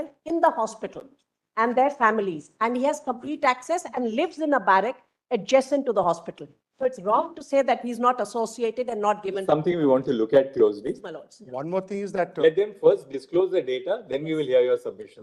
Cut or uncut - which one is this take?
uncut